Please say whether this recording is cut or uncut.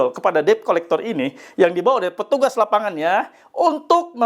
uncut